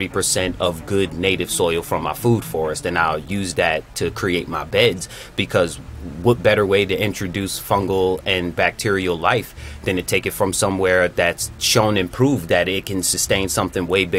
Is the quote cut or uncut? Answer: uncut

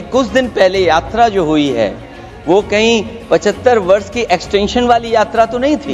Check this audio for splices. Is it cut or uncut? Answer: uncut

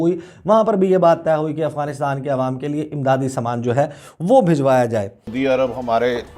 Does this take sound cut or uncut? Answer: cut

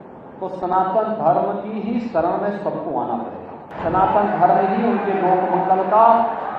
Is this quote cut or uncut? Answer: cut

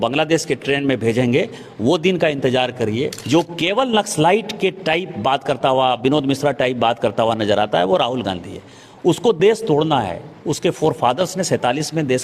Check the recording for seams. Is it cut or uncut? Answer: cut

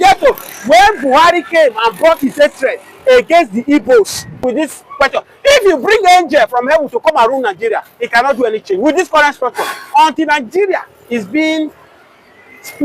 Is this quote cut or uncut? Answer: cut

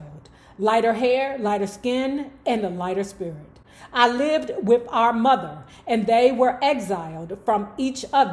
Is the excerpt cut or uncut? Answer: uncut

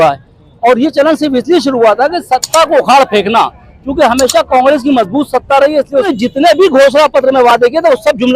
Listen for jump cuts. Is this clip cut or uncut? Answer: cut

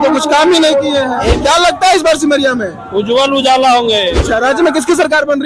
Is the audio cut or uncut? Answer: cut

